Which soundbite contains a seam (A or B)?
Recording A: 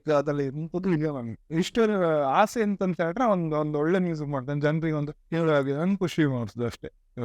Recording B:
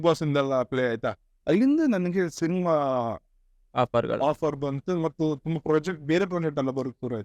A